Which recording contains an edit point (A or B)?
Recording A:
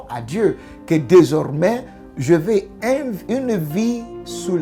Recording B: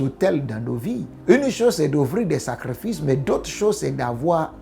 B